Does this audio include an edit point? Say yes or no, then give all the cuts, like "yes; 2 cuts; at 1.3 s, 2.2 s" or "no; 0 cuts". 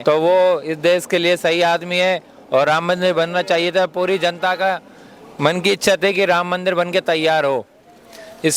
no; 0 cuts